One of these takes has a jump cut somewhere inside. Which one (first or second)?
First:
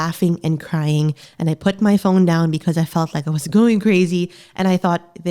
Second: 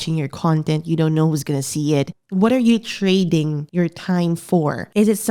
second